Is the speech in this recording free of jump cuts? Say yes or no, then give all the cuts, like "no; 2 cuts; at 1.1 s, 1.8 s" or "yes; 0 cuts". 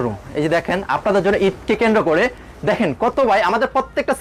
yes; 0 cuts